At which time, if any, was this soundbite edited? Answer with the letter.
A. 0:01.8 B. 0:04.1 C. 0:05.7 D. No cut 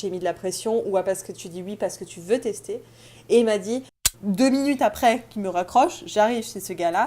B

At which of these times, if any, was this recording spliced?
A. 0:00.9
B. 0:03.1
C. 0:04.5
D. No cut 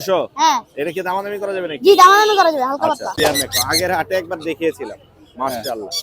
B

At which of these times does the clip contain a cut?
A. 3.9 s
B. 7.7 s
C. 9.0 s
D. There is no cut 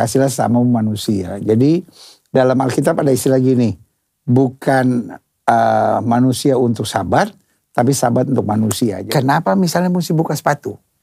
C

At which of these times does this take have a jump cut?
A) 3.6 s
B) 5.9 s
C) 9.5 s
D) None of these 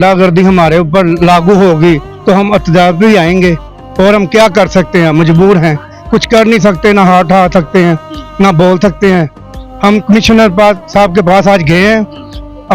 D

